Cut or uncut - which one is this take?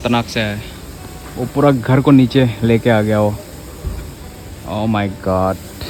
uncut